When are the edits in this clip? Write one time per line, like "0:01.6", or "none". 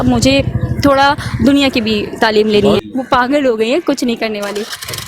0:02.8